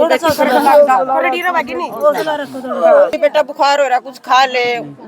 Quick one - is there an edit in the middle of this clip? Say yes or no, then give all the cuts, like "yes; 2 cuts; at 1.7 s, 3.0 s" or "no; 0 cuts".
yes; 1 cut; at 3.1 s